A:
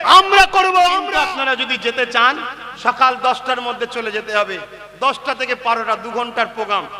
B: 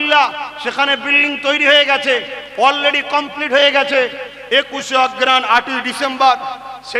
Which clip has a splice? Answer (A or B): A